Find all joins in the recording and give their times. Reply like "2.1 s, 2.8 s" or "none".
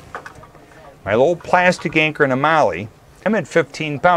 3.2 s